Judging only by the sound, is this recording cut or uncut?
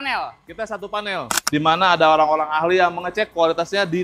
cut